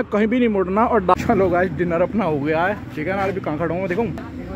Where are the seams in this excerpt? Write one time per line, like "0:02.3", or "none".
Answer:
0:01.1